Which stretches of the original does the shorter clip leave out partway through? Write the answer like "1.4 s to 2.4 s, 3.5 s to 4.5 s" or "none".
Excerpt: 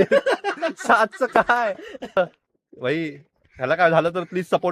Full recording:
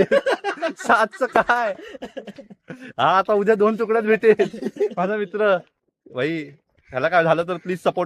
2.2 s to 5.5 s